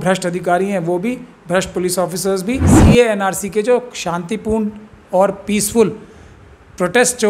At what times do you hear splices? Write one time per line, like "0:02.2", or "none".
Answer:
0:02.7